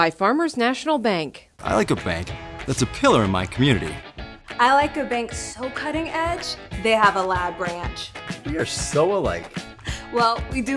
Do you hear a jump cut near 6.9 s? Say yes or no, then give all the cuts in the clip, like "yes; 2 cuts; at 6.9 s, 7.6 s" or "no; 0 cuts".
no; 0 cuts